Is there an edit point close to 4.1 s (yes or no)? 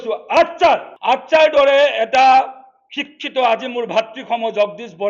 no